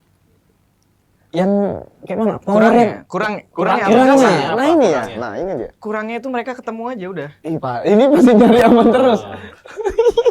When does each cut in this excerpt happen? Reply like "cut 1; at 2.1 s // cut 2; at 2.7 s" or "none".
cut 1; at 7.3 s